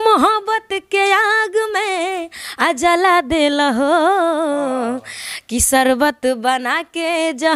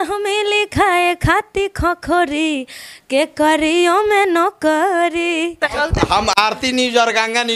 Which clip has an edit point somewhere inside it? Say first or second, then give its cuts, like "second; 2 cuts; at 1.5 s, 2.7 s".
second; 1 cut; at 5.7 s